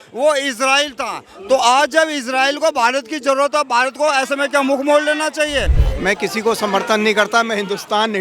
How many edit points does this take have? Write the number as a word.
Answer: one